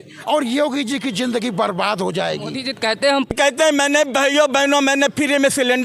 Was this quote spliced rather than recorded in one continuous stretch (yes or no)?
yes